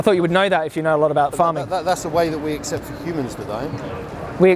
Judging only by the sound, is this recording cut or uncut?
uncut